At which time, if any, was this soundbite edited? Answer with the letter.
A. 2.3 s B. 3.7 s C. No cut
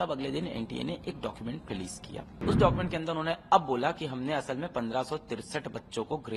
A